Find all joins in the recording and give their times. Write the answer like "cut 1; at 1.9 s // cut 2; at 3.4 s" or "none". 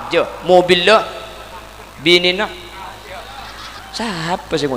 cut 1; at 3.8 s